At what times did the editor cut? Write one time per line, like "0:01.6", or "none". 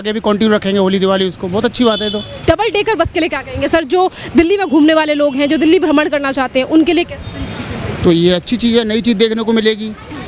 0:02.4